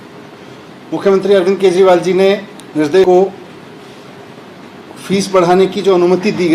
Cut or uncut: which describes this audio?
cut